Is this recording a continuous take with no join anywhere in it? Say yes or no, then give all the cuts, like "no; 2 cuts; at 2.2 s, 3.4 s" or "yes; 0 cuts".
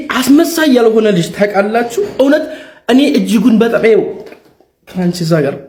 yes; 0 cuts